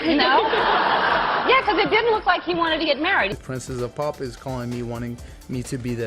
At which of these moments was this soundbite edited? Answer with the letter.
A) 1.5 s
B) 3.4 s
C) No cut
B